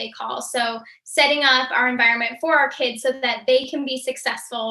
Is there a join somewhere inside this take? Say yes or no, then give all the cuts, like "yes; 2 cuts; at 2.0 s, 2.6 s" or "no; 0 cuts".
no; 0 cuts